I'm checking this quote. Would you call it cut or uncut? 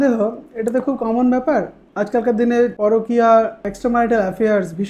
cut